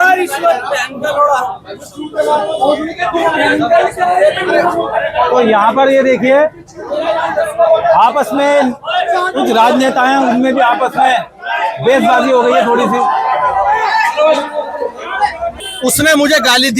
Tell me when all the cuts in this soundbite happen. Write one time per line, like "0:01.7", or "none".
0:15.5